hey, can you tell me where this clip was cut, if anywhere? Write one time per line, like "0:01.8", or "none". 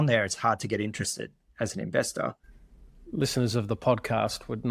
0:02.7